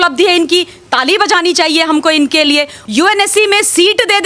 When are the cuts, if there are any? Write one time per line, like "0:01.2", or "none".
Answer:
0:02.8